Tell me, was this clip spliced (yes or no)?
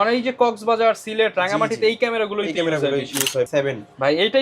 yes